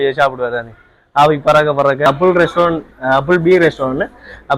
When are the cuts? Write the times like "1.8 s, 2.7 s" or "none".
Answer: 2.1 s